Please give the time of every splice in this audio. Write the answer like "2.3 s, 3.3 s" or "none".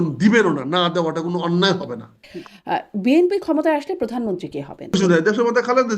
2.3 s, 4.9 s